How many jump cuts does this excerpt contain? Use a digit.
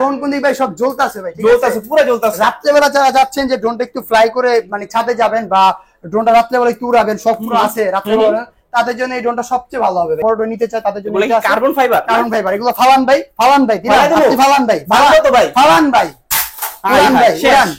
1